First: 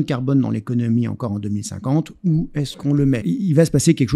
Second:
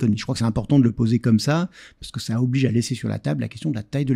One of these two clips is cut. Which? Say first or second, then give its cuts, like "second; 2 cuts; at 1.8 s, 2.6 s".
first; 1 cut; at 3.2 s